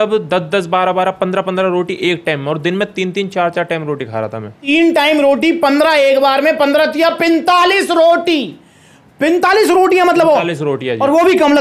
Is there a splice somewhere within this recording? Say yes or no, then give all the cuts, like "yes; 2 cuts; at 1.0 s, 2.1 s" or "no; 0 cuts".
yes; 1 cut; at 4.6 s